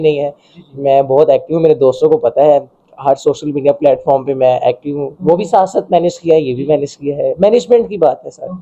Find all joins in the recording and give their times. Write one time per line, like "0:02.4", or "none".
none